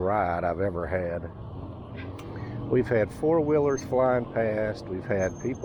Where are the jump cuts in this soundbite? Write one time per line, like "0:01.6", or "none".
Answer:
none